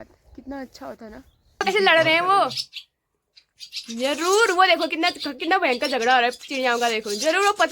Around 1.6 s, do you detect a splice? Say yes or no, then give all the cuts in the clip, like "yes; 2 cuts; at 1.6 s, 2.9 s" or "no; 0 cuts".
yes; 1 cut; at 1.6 s